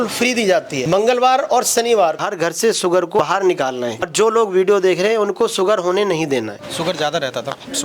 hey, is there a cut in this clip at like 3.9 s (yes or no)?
no